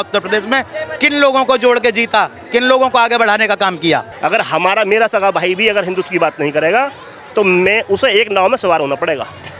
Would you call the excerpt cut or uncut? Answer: cut